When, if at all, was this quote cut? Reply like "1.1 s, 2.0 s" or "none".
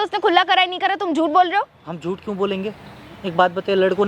none